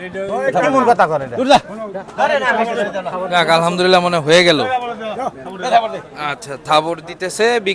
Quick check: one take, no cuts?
yes; 0 cuts

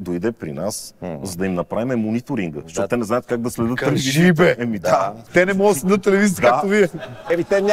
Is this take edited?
yes; 1 cut; at 5.2 s

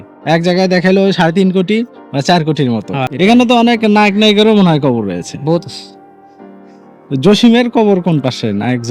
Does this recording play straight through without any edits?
yes; 0 cuts

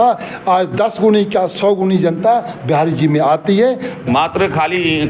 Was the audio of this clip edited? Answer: yes; 1 cut; at 3.9 s

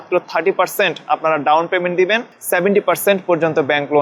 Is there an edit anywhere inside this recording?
yes; 1 cut; at 2.3 s

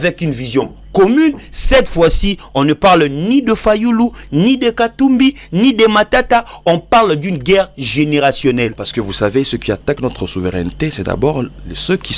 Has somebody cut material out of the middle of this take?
yes; 1 cut; at 8.8 s

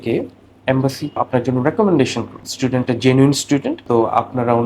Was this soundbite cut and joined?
yes; 3 cuts; at 1.2 s, 2.4 s, 3.8 s

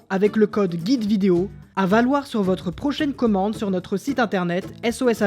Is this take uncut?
no; 1 cut; at 1.6 s

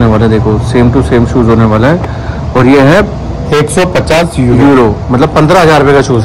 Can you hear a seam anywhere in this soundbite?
no; 0 cuts

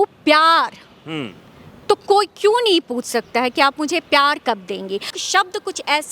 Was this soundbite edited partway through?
yes; 1 cut; at 5.1 s

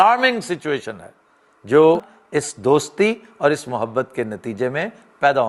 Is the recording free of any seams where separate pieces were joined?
no; 1 cut; at 2.1 s

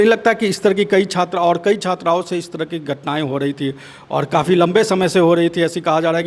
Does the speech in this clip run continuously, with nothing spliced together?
yes; 0 cuts

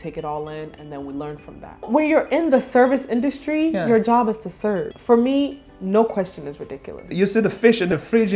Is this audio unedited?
no; 3 cuts; at 1.9 s, 4.9 s, 7.1 s

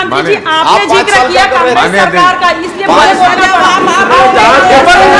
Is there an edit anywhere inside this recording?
no; 0 cuts

